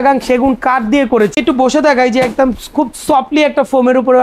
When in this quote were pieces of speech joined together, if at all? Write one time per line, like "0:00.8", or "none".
0:01.3